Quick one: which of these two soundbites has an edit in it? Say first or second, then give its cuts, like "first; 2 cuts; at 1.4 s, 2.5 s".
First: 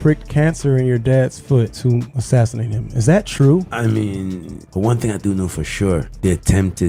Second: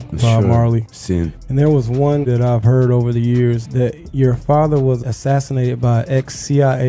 first; 1 cut; at 4.3 s